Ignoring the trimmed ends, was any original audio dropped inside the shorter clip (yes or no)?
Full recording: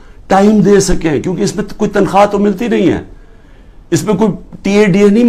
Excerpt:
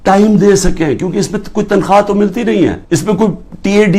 yes